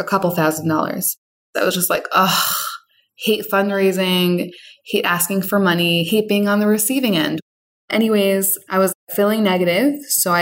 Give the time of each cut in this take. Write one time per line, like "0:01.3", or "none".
0:01.5
0:07.4
0:08.8